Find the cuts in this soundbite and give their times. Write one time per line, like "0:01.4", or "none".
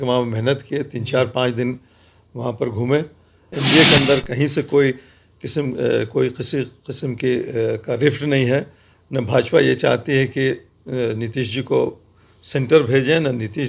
0:03.5